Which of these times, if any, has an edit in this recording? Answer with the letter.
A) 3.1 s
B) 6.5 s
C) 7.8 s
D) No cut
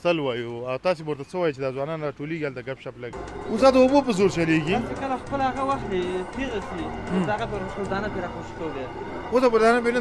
A